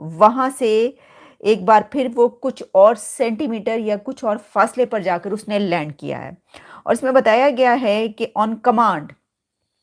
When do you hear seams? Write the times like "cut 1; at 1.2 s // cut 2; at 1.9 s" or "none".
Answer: none